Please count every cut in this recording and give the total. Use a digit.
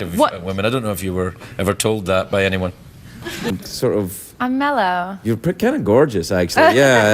1